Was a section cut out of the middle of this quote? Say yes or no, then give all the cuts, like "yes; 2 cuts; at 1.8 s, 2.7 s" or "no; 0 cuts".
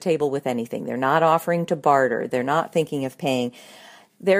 yes; 1 cut; at 2.3 s